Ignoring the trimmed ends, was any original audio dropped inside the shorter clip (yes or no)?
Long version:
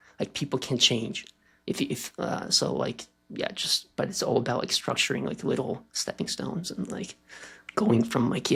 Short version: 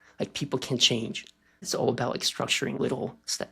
yes